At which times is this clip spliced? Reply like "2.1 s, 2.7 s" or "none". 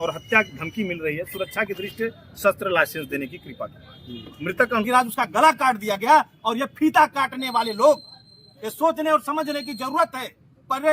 4.8 s